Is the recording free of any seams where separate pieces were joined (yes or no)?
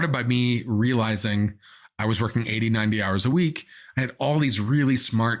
yes